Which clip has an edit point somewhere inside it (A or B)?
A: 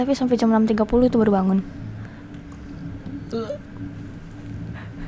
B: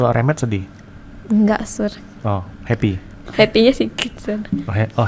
B